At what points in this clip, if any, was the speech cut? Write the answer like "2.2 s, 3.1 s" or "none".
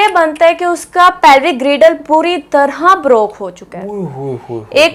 none

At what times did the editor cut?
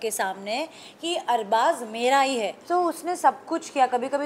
2.6 s

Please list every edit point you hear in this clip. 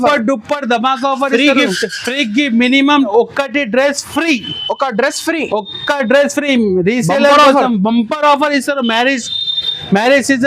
3.1 s

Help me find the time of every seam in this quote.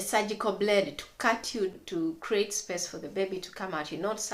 1.7 s

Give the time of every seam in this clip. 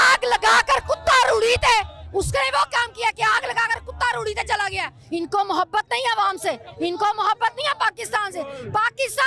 4.9 s

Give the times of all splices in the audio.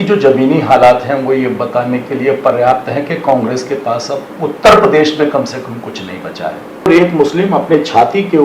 6.9 s

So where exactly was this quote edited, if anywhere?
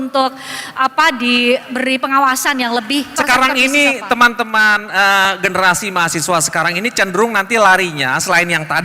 3.1 s

